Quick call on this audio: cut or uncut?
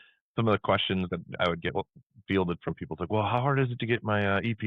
cut